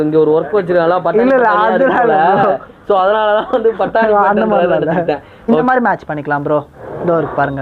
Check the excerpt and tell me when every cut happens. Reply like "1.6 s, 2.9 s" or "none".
5.3 s